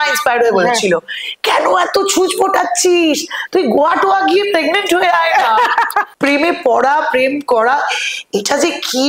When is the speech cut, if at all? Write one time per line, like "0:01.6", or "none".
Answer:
0:06.1